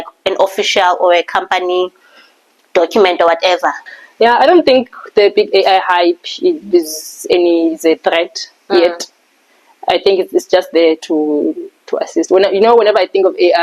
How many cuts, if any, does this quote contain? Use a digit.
1